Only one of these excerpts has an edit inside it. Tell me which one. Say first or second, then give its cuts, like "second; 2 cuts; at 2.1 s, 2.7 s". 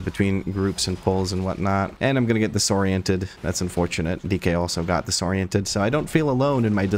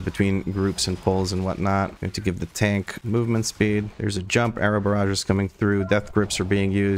first; 1 cut; at 1.9 s